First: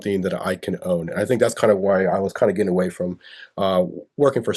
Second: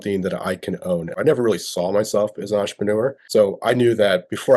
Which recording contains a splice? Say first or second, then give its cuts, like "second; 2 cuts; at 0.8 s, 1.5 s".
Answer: second; 2 cuts; at 1.1 s, 3.2 s